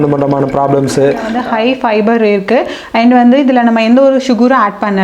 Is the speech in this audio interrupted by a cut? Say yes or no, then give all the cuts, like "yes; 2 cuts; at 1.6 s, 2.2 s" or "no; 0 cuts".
yes; 1 cut; at 1.4 s